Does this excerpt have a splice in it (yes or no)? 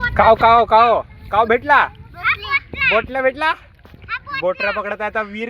no